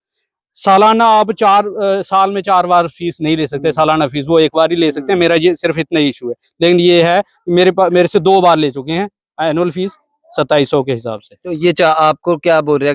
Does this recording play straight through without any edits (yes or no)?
yes